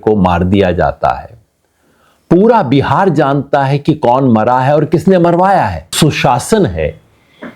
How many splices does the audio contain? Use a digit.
1